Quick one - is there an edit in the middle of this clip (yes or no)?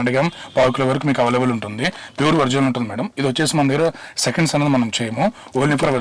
no